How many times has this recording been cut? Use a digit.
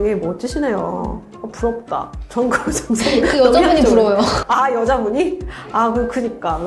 0